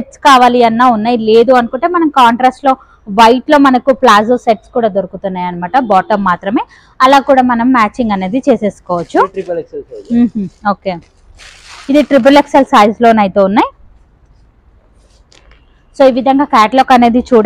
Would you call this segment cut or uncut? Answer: uncut